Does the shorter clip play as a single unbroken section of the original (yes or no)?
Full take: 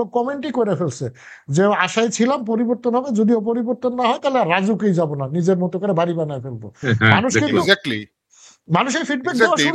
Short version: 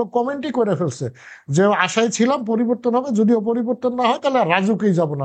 yes